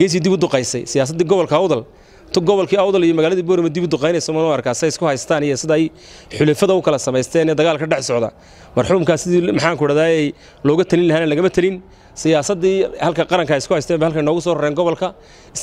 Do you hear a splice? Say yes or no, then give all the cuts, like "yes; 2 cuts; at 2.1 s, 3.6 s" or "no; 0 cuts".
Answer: no; 0 cuts